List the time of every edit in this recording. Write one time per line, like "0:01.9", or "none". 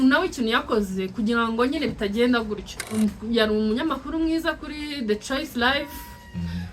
0:03.0